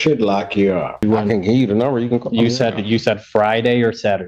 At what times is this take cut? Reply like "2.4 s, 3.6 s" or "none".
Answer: 1.0 s